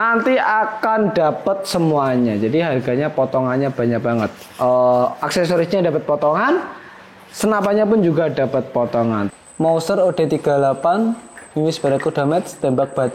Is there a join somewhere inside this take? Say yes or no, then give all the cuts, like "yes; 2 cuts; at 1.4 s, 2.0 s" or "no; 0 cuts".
yes; 1 cut; at 9.3 s